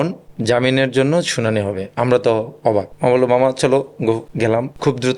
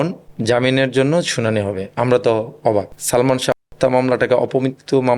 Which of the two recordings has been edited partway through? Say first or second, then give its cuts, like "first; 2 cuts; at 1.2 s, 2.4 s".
second; 1 cut; at 2.9 s